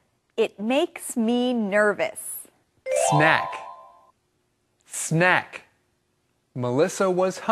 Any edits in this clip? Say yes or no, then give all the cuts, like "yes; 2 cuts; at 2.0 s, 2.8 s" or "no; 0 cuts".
no; 0 cuts